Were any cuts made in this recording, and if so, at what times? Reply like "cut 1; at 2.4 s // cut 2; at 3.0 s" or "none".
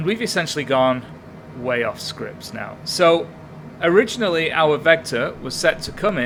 none